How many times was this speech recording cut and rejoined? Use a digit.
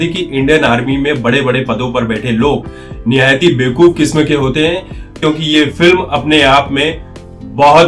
1